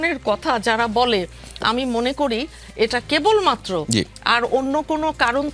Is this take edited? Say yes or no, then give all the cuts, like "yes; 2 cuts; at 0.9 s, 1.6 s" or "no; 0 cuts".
no; 0 cuts